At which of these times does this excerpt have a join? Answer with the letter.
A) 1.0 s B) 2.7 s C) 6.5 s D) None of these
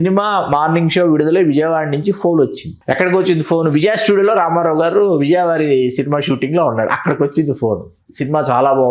B